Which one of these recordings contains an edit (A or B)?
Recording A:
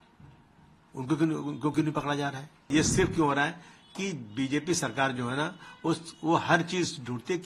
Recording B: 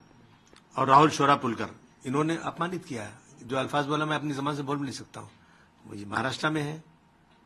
A